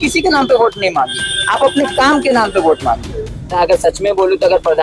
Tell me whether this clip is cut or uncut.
cut